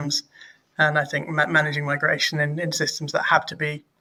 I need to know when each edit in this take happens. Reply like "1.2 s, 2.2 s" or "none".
none